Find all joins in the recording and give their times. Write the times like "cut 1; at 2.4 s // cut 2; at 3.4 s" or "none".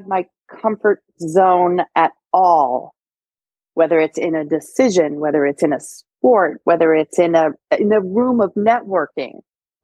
none